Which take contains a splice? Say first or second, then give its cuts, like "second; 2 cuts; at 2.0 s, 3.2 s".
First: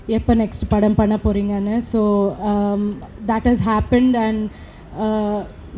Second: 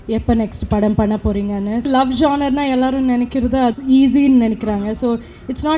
second; 2 cuts; at 1.9 s, 3.7 s